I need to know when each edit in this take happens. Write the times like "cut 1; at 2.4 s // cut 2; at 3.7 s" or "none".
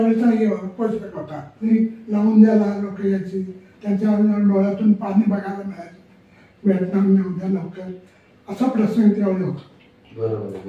cut 1; at 1.7 s